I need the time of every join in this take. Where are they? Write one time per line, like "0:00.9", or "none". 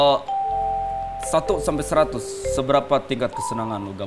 none

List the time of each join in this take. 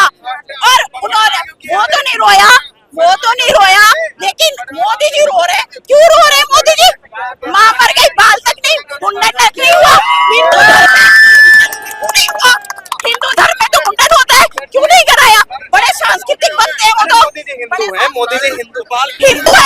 none

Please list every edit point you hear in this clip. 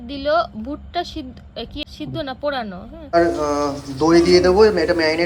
0:01.8
0:02.9

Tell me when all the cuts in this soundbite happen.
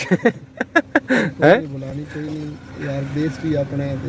none

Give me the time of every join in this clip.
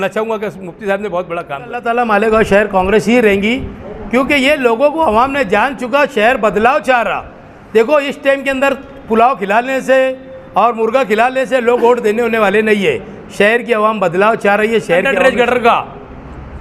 0:01.8
0:15.1

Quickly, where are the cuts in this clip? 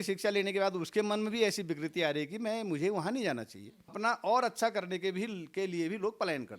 0:04.0

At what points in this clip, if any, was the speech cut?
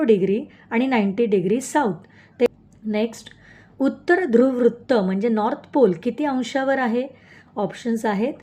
0:02.5

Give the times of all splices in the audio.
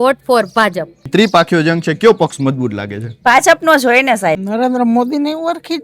0:01.1
0:04.4

